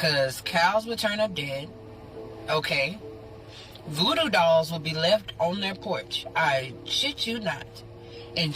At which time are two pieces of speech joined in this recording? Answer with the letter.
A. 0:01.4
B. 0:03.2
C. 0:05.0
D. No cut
D